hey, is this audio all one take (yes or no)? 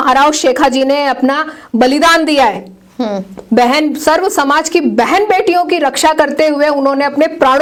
yes